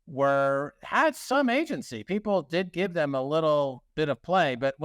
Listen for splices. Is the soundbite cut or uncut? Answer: uncut